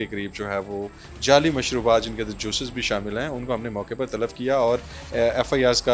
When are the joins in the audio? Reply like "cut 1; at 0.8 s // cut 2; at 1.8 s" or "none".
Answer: none